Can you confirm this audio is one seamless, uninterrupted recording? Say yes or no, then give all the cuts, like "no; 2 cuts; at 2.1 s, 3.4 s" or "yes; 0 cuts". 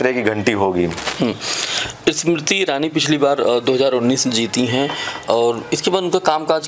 yes; 0 cuts